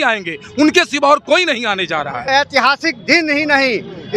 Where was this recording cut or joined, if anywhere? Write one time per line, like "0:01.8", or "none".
0:02.3